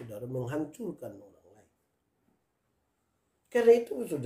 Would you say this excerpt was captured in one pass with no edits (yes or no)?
no